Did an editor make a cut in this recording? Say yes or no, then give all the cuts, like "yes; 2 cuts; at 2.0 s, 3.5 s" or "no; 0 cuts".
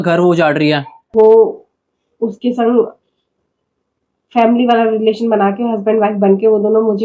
yes; 1 cut; at 0.9 s